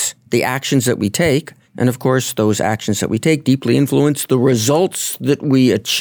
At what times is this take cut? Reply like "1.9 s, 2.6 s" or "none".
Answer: 1.6 s